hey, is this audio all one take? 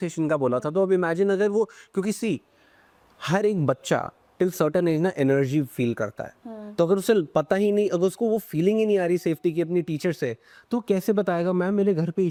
yes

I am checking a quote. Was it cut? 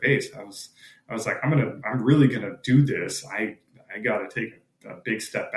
no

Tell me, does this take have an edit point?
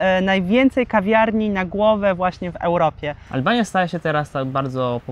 yes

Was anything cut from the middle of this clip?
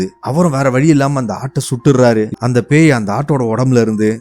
yes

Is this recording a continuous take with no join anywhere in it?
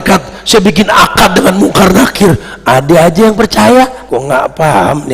no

